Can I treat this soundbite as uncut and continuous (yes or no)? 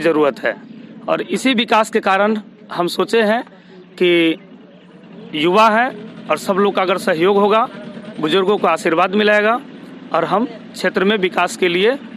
yes